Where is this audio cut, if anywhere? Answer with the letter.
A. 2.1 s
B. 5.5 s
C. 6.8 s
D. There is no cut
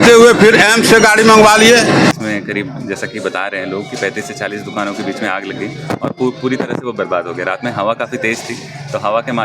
A